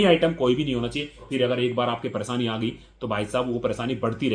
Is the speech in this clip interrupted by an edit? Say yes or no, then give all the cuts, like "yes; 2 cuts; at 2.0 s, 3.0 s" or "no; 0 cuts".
yes; 1 cut; at 1.2 s